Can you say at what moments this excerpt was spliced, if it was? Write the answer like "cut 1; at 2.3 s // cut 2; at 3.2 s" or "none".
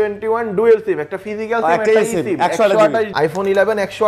cut 1; at 3.1 s